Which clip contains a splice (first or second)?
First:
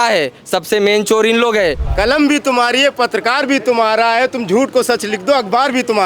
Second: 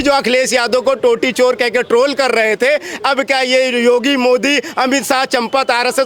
first